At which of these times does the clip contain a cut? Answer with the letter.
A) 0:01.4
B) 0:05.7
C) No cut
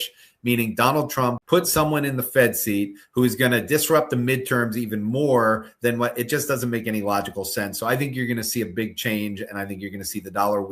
A